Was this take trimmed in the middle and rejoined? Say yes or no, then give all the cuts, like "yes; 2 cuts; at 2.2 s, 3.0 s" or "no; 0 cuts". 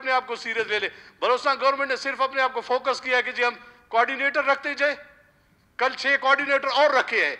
no; 0 cuts